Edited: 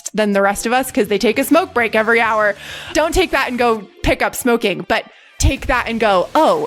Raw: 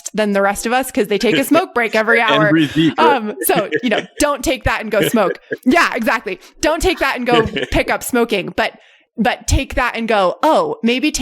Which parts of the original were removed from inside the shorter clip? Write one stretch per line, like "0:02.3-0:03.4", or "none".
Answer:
0:02.5-0:06.2
0:09.0-0:09.4